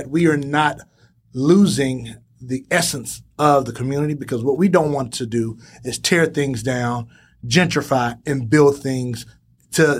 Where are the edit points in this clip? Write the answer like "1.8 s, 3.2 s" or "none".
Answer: none